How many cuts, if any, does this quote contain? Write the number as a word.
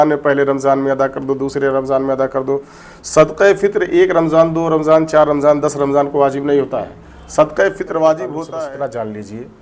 one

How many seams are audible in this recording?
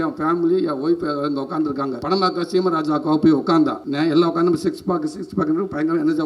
two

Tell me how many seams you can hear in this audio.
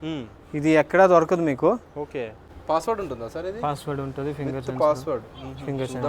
one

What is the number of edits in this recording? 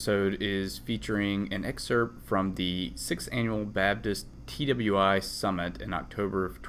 one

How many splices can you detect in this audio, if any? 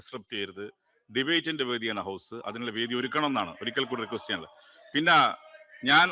zero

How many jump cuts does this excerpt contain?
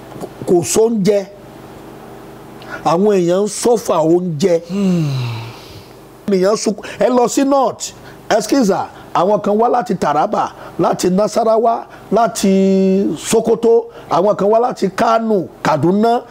one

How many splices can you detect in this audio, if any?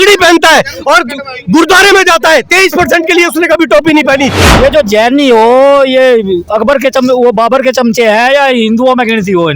one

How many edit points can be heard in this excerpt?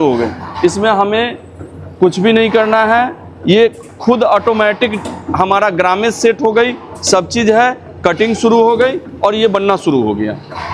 zero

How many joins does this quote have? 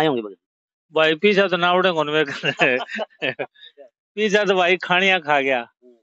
zero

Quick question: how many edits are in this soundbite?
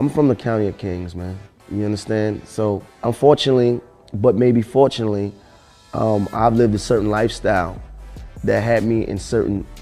one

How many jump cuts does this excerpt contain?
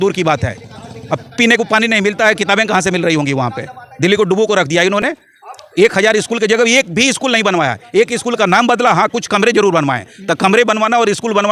zero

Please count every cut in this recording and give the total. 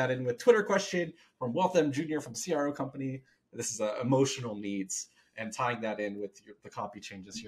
zero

